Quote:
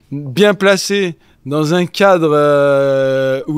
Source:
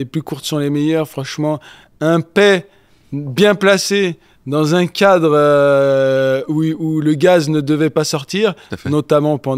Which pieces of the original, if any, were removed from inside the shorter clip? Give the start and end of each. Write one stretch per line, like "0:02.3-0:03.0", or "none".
none